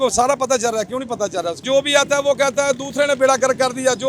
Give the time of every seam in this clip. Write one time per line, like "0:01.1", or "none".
0:01.6